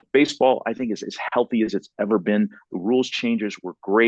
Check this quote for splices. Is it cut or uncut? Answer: uncut